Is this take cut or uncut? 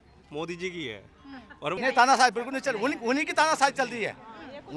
cut